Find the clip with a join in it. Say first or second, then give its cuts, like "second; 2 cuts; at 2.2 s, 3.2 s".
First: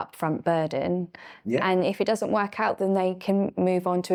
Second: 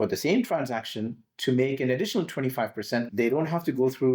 second; 1 cut; at 3.1 s